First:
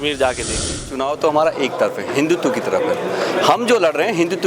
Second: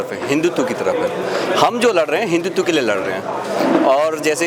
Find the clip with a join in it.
first; 1 cut; at 0.9 s

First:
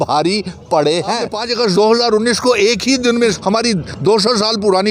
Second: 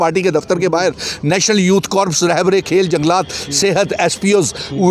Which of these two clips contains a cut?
first; 2 cuts; at 1.4 s, 3.4 s

